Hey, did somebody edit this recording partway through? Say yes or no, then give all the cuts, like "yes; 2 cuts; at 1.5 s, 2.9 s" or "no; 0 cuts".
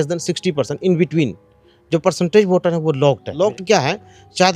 yes; 1 cut; at 3.3 s